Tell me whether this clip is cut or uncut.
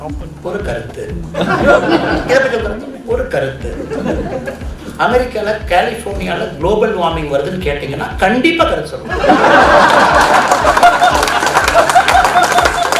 uncut